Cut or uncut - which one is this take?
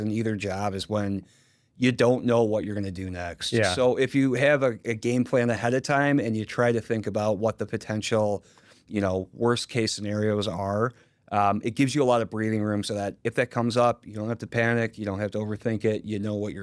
uncut